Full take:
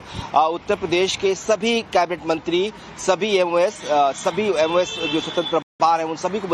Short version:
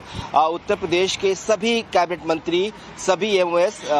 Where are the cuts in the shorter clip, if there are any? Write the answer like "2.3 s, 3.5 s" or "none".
none